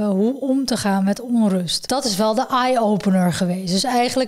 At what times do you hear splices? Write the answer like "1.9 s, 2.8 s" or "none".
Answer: 1.8 s